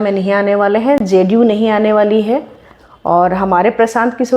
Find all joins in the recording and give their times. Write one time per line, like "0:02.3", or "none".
none